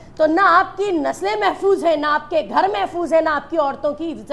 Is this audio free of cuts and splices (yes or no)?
yes